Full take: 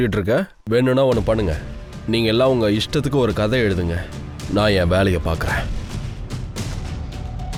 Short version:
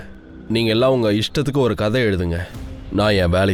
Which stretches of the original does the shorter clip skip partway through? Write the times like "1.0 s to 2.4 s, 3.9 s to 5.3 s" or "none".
none